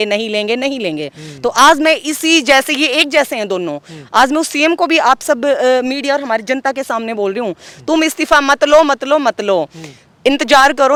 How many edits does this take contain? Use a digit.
0